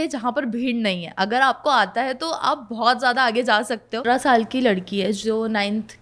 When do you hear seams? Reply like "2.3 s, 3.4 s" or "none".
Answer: 4.0 s